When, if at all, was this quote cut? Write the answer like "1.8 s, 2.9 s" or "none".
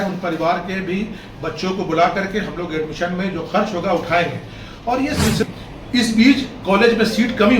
5.4 s

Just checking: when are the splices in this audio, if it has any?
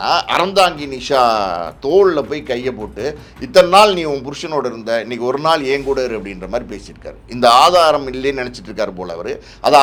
none

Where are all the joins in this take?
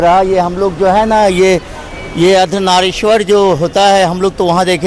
none

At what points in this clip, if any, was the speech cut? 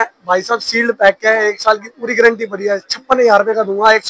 none

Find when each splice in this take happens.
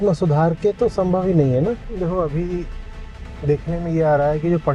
1.8 s

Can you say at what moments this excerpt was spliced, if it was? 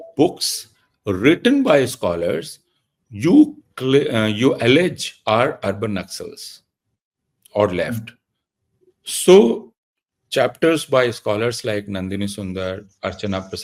none

